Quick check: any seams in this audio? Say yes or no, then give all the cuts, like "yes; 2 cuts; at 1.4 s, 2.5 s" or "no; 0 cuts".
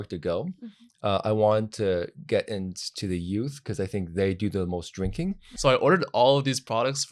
yes; 1 cut; at 5.5 s